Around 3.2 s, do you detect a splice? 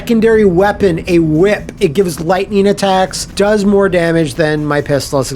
yes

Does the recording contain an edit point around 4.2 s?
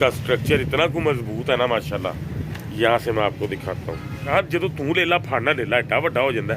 yes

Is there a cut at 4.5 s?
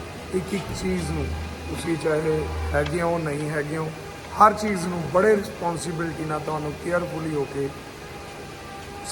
no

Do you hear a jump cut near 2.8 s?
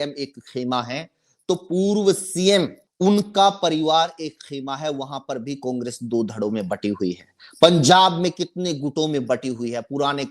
yes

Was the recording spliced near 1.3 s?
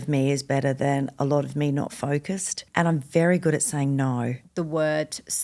no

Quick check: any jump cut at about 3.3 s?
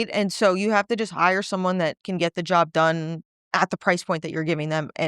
yes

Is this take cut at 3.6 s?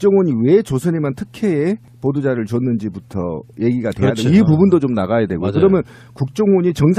yes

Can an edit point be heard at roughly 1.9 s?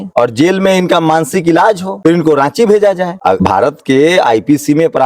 yes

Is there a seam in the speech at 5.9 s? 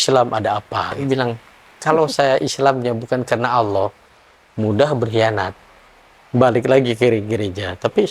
no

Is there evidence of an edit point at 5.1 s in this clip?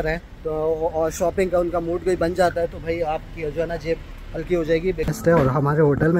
yes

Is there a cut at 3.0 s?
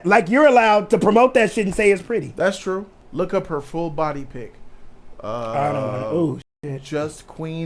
yes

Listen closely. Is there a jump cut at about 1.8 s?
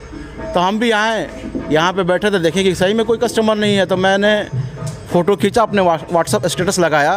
no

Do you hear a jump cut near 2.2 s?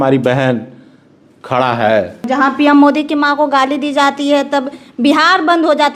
yes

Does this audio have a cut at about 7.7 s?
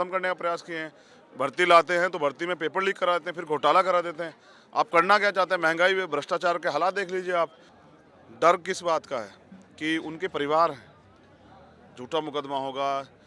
yes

